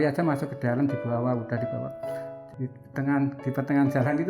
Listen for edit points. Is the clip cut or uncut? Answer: cut